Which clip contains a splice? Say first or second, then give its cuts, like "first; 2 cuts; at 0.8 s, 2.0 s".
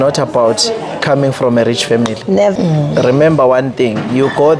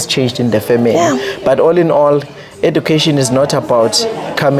first; 1 cut; at 2.5 s